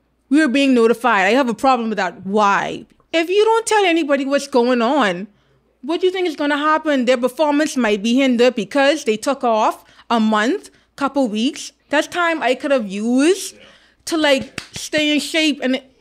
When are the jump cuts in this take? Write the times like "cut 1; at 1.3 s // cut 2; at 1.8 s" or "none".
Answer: cut 1; at 2.8 s // cut 2; at 11.7 s